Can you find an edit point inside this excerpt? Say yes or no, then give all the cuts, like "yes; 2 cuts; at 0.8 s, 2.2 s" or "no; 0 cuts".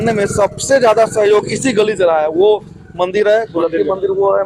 no; 0 cuts